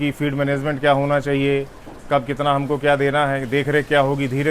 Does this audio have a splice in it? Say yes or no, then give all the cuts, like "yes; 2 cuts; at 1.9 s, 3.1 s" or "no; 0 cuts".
no; 0 cuts